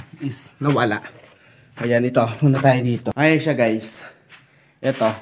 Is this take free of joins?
no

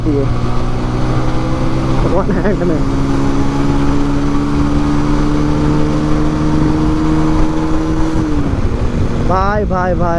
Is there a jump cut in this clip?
no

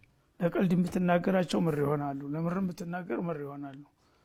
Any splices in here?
no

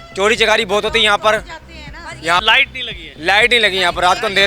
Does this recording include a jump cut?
yes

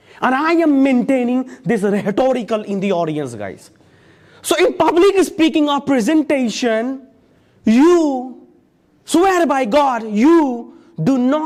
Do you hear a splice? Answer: no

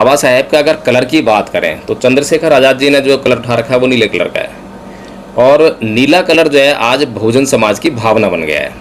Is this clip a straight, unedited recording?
yes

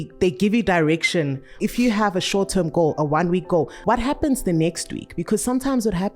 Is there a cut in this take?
yes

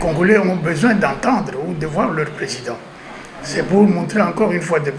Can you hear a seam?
no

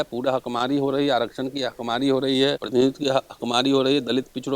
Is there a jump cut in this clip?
yes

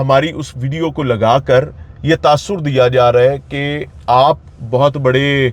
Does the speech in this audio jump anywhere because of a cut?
no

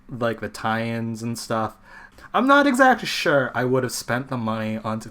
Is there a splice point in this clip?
yes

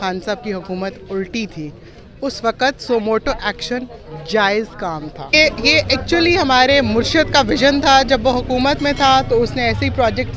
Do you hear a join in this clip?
yes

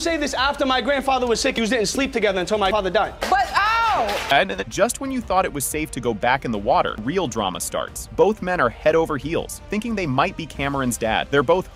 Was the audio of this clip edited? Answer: no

